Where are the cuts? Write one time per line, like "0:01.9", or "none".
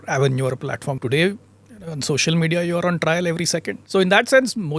0:01.0
0:03.8